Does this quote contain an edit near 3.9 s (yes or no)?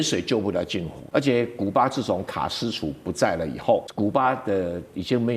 yes